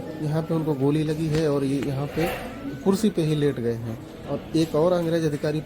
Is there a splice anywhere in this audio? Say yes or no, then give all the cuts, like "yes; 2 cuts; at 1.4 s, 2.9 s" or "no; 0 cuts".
no; 0 cuts